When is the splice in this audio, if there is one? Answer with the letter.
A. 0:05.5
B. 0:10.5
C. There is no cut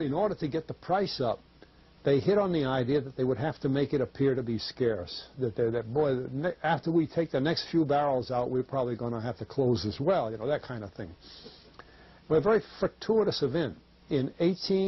A